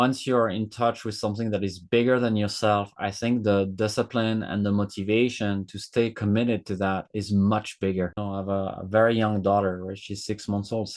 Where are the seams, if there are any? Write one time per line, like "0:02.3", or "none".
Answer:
0:08.2